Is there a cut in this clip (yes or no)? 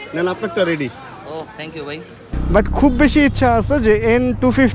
yes